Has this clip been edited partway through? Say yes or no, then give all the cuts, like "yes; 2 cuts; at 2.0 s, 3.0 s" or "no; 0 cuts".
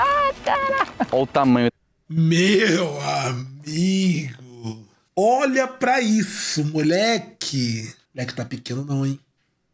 yes; 1 cut; at 1.6 s